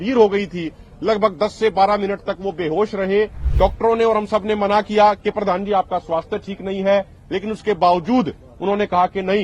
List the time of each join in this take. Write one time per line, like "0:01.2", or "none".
0:03.4